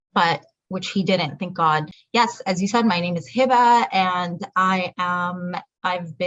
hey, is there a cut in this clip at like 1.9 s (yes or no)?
yes